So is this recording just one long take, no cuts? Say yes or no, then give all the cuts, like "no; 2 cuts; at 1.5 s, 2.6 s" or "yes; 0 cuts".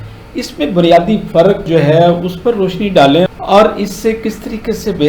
yes; 0 cuts